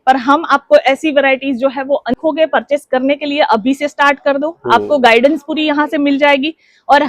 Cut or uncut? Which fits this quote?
cut